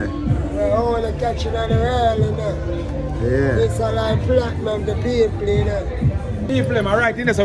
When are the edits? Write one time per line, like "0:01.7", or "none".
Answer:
0:06.4